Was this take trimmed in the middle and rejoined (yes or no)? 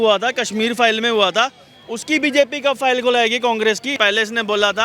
yes